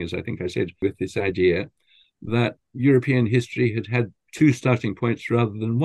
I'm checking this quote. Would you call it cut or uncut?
cut